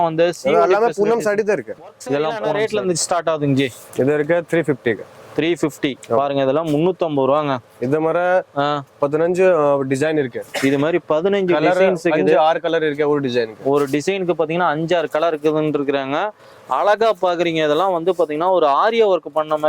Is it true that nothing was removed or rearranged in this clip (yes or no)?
no